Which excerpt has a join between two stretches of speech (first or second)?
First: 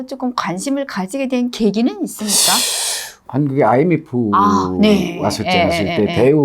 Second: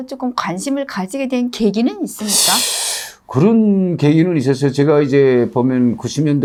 first